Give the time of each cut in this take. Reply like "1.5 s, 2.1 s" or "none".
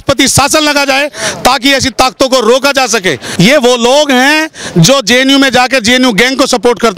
3.2 s

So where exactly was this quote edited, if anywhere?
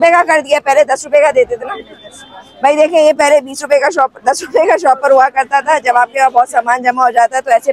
none

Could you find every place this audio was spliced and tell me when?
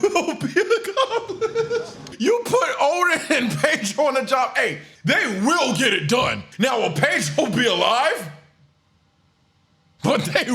2.0 s, 4.9 s

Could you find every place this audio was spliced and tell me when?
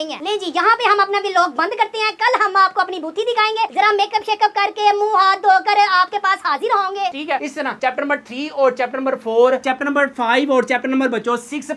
7.1 s

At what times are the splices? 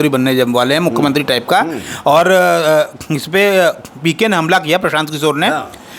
none

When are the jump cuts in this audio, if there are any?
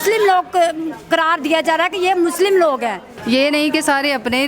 3.1 s

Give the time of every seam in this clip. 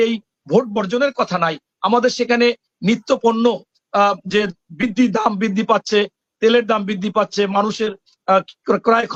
none

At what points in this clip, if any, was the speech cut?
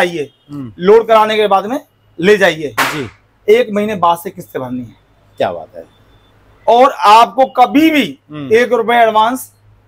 none

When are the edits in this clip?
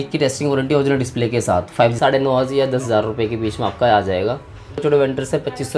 2.0 s, 4.8 s

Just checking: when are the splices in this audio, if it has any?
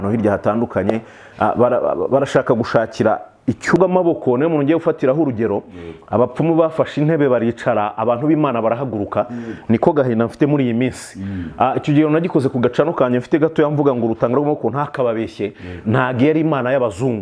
3.8 s

